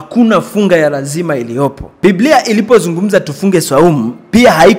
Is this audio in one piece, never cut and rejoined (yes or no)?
no